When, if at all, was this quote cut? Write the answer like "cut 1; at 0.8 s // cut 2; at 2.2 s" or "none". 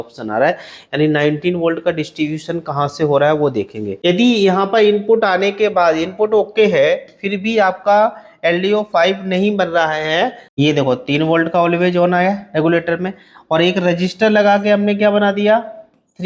cut 1; at 3.9 s // cut 2; at 10.4 s